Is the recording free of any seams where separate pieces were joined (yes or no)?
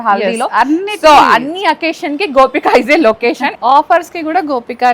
no